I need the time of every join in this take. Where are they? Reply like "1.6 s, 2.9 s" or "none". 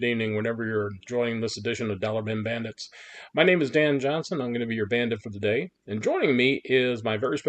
none